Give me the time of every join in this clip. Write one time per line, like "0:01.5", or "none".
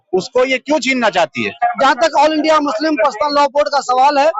0:01.6